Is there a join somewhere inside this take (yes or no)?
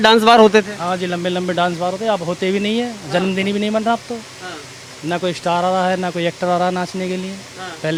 no